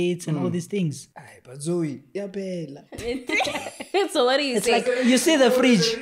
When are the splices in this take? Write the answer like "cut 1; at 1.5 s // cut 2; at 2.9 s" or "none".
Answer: cut 1; at 1.0 s

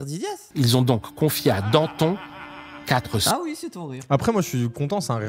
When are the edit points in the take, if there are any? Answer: none

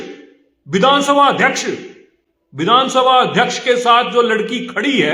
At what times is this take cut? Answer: none

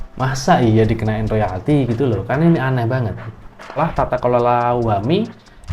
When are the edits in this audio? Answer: cut 1; at 3.8 s

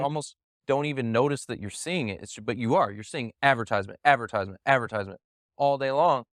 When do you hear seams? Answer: none

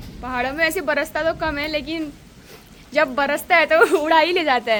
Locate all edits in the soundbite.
none

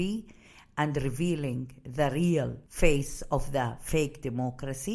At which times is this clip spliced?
cut 1; at 2.6 s

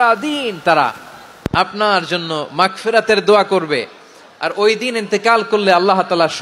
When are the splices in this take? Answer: none

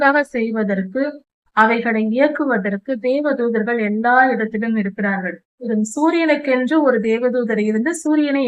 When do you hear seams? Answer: cut 1; at 5.7 s

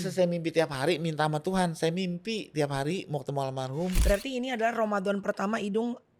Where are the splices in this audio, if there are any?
cut 1; at 4.0 s

